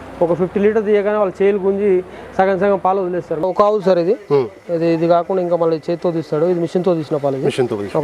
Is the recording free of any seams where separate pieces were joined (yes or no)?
no